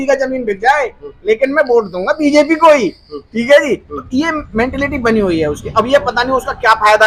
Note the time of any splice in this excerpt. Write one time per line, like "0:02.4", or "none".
none